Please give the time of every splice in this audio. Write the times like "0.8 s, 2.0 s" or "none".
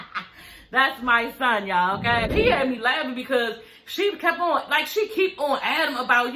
2.3 s